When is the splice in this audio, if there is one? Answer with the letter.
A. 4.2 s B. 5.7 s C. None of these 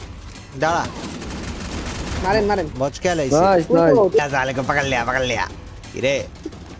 A